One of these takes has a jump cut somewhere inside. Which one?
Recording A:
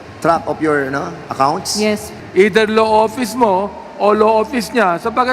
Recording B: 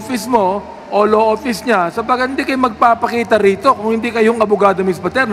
A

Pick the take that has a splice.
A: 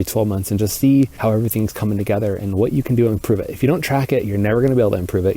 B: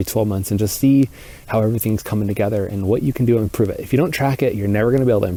A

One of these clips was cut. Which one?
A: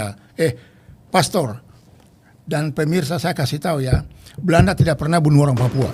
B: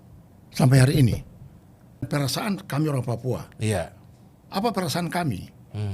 B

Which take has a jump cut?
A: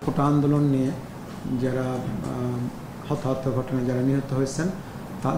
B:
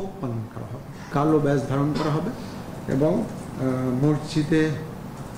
B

